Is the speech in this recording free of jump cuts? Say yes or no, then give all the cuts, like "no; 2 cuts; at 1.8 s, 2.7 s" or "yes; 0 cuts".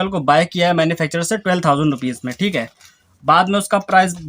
yes; 0 cuts